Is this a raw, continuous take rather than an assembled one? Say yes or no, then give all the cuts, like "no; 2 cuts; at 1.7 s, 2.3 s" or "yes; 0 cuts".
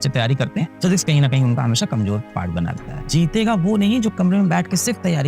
no; 1 cut; at 2.9 s